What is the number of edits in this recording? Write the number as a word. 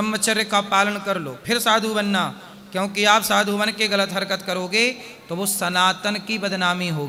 zero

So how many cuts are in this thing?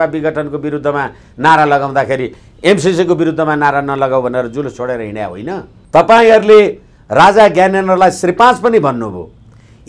one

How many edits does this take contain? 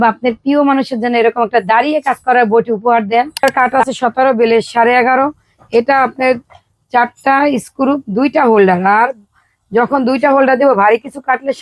one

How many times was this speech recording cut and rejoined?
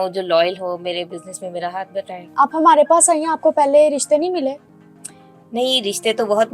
one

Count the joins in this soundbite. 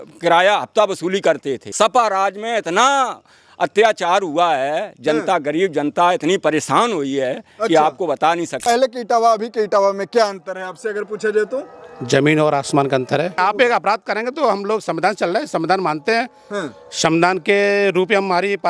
three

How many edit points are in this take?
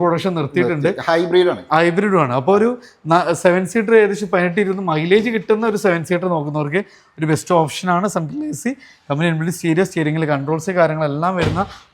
zero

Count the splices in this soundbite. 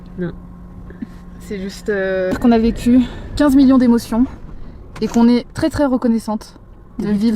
one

